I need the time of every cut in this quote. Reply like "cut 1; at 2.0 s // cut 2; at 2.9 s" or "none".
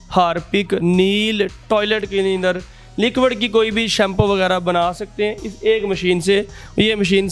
none

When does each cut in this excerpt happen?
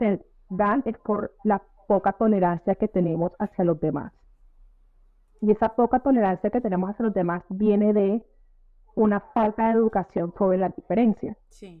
none

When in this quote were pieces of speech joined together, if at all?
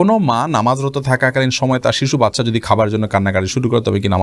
none

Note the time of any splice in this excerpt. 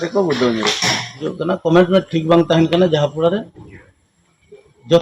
cut 1; at 1.3 s

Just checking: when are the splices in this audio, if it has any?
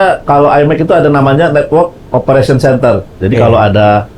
cut 1; at 3.1 s

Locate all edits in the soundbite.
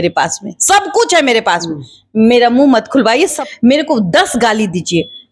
cut 1; at 3.4 s

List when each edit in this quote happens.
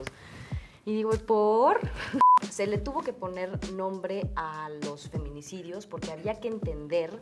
cut 1; at 2.3 s

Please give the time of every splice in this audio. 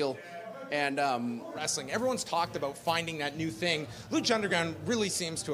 cut 1; at 1.7 s

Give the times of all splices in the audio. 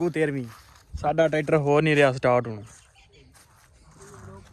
none

